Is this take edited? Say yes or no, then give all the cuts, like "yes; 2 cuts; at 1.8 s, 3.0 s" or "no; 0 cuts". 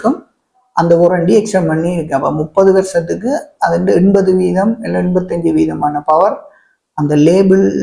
no; 0 cuts